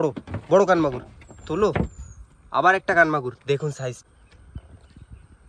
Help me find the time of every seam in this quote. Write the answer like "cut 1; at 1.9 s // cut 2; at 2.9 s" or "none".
cut 1; at 4.0 s